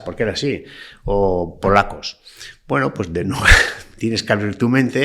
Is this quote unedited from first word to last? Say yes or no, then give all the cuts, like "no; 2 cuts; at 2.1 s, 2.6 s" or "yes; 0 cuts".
yes; 0 cuts